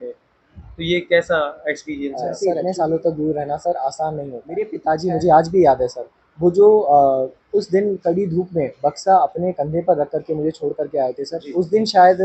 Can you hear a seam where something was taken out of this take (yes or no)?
yes